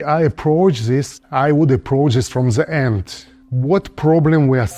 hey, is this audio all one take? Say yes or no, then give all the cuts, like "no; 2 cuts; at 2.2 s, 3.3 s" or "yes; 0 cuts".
yes; 0 cuts